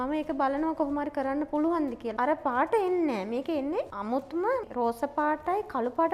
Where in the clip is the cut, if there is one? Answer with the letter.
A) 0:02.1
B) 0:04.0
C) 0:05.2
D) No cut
A